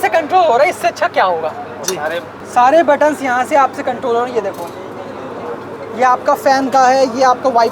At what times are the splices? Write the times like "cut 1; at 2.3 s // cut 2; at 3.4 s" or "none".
none